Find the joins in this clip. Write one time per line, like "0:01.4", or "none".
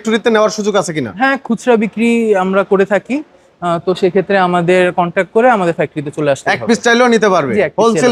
none